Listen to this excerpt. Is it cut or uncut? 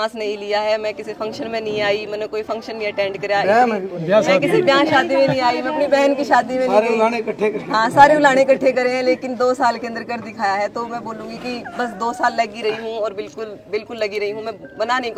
uncut